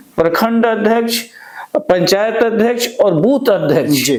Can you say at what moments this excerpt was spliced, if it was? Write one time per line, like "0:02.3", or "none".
none